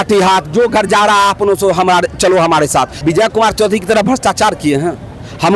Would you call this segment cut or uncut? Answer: cut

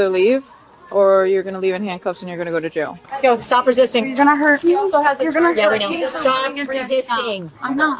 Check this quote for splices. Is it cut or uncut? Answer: cut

